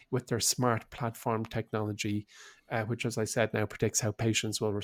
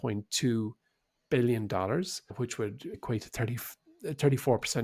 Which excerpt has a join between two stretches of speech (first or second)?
second